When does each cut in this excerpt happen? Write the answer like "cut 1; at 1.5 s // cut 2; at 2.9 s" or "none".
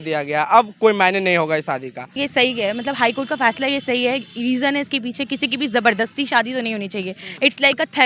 cut 1; at 2.2 s